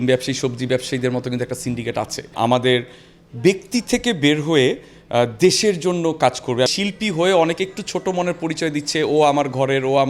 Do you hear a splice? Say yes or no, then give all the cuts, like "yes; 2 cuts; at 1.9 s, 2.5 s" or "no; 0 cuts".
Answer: yes; 2 cuts; at 2.3 s, 6.7 s